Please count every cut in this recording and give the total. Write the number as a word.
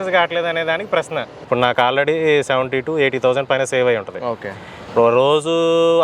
one